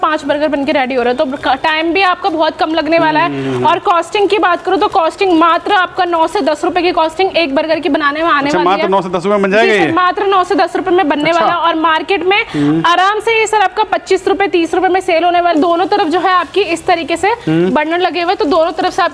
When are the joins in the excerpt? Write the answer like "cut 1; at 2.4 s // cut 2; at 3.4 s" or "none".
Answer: none